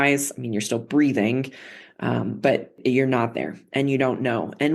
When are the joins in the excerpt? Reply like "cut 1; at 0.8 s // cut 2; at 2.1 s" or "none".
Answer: cut 1; at 2.8 s